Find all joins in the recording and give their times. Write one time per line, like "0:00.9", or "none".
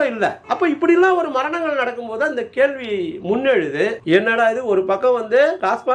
0:04.0